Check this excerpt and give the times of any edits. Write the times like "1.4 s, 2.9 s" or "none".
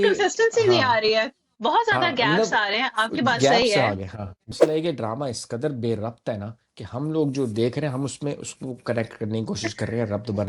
4.5 s